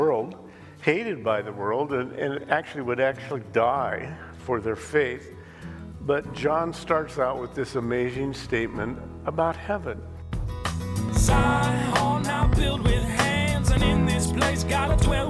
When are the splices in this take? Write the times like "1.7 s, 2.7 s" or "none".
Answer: 10.6 s